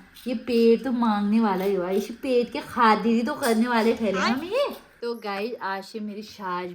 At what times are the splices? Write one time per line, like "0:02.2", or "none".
0:04.9